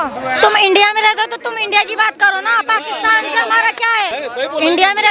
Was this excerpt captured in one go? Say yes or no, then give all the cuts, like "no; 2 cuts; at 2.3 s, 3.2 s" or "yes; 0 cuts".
no; 1 cut; at 4.1 s